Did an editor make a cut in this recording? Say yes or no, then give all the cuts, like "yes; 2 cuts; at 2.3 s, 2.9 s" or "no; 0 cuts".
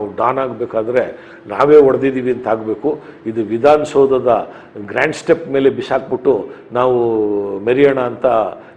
no; 0 cuts